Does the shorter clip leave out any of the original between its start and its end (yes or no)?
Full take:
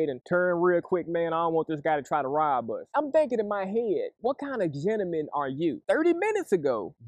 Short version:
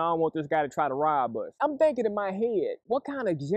no